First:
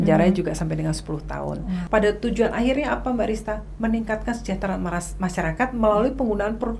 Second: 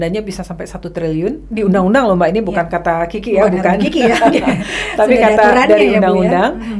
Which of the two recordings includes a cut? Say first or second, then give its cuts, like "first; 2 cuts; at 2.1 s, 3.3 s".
first; 1 cut; at 1.8 s